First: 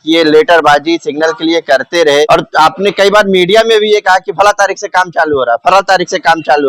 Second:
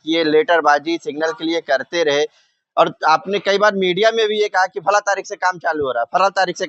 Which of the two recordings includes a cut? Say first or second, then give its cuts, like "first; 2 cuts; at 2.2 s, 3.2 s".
first; 1 cut; at 2.3 s